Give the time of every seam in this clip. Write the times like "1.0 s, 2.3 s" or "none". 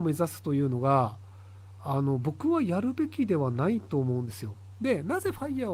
none

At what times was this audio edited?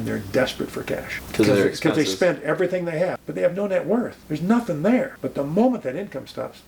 1.2 s, 3.2 s, 4.2 s, 5.2 s

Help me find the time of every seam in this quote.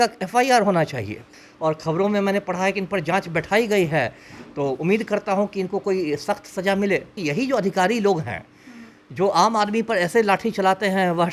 1.4 s, 7.2 s

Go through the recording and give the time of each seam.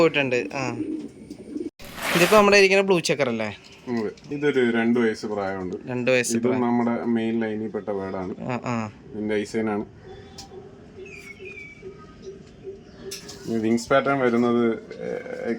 1.8 s, 4.2 s, 13.2 s

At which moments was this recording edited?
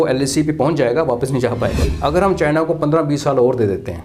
1.9 s

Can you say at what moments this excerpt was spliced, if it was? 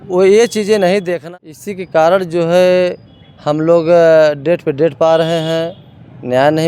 1.2 s

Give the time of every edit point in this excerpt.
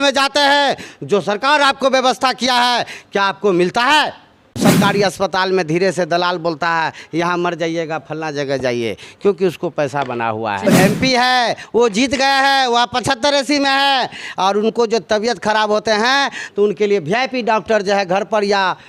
4.6 s, 10.7 s

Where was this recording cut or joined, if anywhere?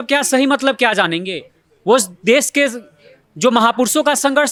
none

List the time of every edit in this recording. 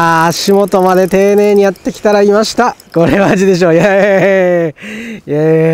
2.8 s

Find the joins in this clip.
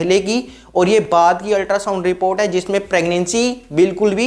none

